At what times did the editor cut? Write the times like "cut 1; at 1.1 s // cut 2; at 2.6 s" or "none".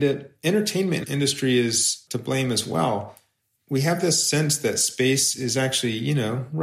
cut 1; at 1.0 s // cut 2; at 2.0 s